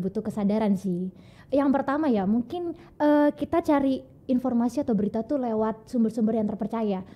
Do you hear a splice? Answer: no; 0 cuts

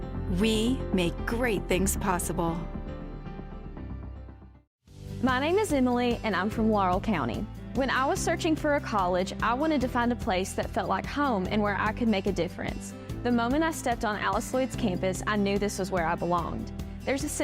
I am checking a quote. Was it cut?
yes; 1 cut; at 4.7 s

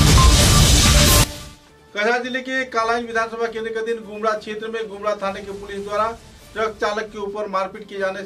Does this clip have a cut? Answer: yes; 1 cut; at 1.2 s

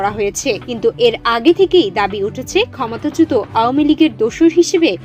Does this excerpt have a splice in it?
no; 0 cuts

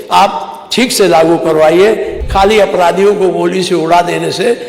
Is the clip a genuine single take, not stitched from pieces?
no; 1 cut; at 2.1 s

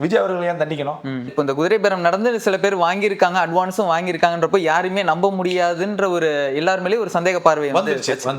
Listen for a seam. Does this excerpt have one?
yes; 1 cut; at 1.3 s

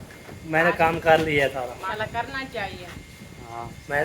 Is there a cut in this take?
yes; 1 cut; at 1.9 s

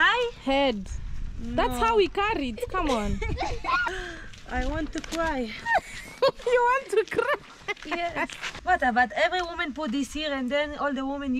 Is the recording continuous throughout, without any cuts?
no; 2 cuts; at 3.8 s, 8.4 s

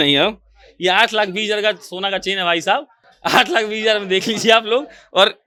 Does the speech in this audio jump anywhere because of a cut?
no; 0 cuts

